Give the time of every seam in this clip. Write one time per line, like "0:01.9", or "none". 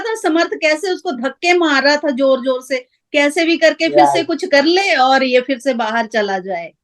none